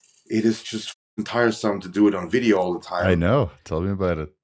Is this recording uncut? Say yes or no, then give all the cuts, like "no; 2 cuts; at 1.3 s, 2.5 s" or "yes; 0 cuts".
yes; 0 cuts